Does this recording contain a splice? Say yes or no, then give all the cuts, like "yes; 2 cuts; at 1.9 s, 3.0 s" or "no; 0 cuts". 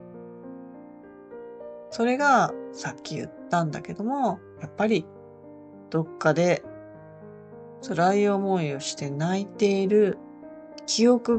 yes; 1 cut; at 2.0 s